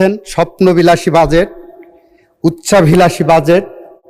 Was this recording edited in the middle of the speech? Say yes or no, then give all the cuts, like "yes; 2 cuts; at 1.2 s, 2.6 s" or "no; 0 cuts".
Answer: no; 0 cuts